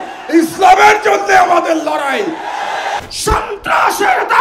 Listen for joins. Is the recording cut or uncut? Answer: cut